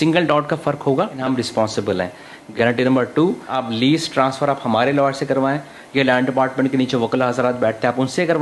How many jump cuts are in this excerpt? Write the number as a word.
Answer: three